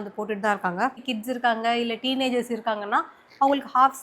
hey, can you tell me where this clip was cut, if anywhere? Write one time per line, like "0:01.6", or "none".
0:01.0